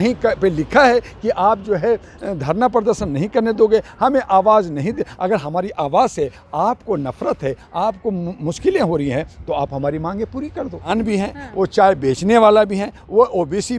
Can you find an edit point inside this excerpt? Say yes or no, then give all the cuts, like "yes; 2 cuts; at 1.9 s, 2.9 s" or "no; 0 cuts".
yes; 1 cut; at 10.9 s